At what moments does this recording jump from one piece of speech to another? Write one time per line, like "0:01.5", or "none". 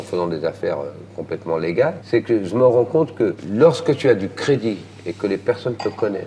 0:02.0
0:03.4